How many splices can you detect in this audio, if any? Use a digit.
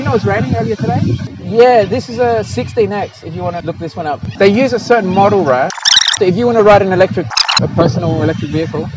4